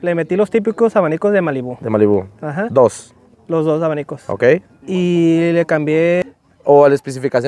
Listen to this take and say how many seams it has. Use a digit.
1